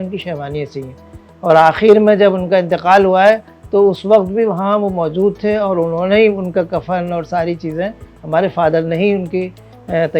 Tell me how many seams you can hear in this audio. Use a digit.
0